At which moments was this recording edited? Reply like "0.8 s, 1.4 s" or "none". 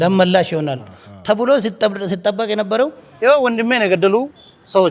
none

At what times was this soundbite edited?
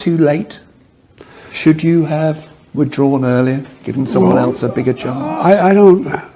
3.8 s

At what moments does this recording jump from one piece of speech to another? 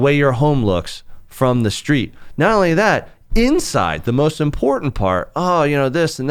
none

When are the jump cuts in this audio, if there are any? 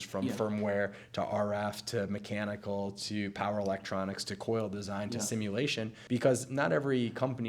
6.0 s

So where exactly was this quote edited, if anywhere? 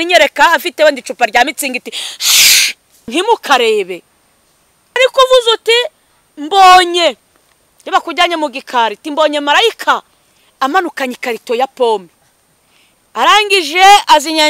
3.1 s, 5.0 s

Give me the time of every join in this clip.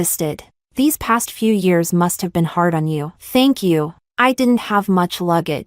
4.0 s

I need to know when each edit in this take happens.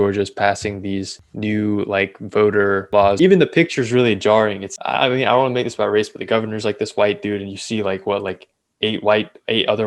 1.2 s, 3.0 s, 4.7 s

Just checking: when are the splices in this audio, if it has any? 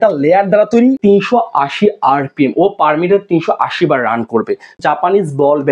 1.0 s, 4.8 s

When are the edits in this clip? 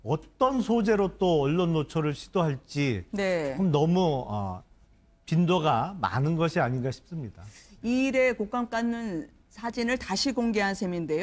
4.0 s

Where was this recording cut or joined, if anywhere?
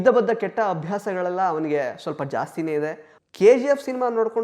3.1 s

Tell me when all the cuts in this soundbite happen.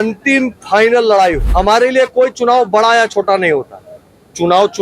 1.4 s

